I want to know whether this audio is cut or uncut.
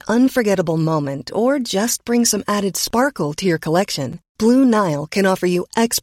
uncut